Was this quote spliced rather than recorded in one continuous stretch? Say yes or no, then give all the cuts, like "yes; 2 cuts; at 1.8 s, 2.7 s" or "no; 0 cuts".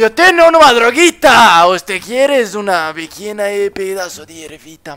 no; 0 cuts